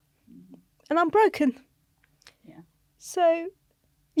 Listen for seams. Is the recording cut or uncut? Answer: uncut